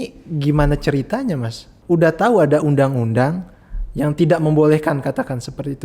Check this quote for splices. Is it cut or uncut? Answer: cut